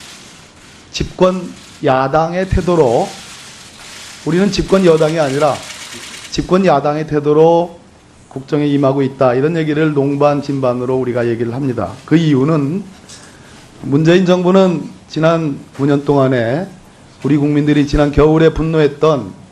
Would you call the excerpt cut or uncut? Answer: uncut